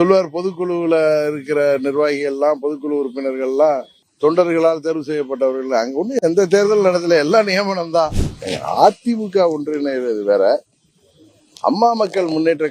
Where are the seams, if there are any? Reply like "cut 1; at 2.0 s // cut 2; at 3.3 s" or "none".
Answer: cut 1; at 8.2 s